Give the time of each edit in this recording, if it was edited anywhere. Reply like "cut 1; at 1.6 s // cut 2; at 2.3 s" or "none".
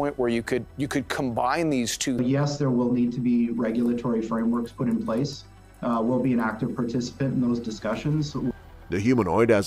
none